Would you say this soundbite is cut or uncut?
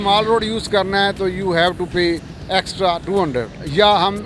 uncut